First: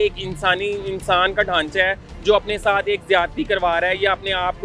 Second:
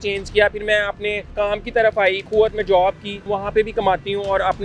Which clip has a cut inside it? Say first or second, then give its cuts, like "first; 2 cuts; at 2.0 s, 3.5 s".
second; 3 cuts; at 1.3 s, 2.2 s, 3.3 s